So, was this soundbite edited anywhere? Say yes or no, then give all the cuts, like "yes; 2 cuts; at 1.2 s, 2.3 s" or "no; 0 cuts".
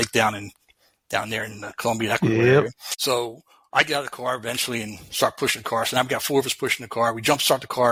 no; 0 cuts